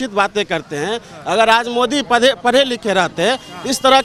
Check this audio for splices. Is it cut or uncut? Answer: uncut